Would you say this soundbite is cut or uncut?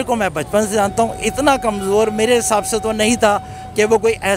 uncut